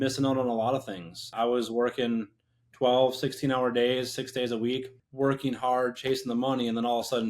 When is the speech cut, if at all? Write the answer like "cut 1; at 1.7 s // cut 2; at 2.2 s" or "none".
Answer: cut 1; at 1.2 s // cut 2; at 5.0 s